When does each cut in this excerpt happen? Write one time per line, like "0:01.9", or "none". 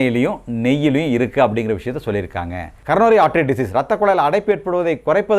0:02.8